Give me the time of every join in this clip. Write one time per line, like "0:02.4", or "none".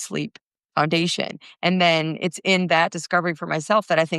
none